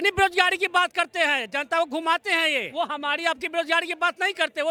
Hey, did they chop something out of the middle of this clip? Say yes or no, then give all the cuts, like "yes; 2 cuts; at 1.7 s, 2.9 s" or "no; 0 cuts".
no; 0 cuts